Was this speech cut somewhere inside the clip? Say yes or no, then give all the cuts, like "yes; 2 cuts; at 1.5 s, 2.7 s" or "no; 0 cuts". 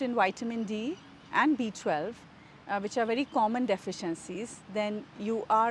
no; 0 cuts